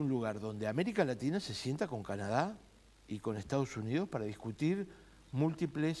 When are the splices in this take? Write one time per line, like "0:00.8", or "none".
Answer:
none